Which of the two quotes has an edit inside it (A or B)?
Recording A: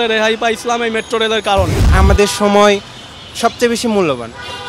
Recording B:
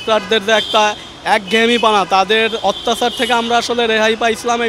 A